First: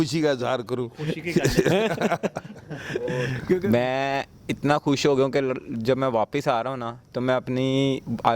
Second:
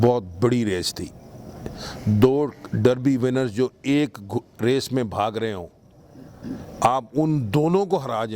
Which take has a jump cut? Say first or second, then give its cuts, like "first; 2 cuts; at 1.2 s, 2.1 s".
first; 1 cut; at 3.6 s